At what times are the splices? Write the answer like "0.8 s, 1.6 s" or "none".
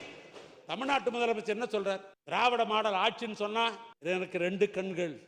2.1 s, 3.9 s